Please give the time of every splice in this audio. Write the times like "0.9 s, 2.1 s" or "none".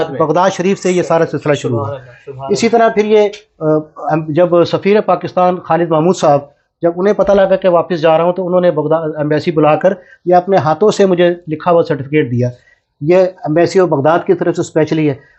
none